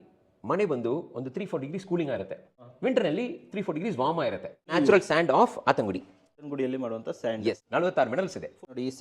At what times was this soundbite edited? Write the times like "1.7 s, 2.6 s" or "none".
4.7 s